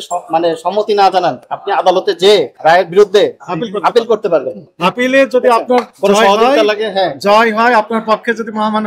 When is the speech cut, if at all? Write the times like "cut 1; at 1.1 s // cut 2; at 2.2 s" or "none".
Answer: cut 1; at 1.5 s // cut 2; at 2.5 s // cut 3; at 3.5 s // cut 4; at 4.6 s // cut 5; at 5.9 s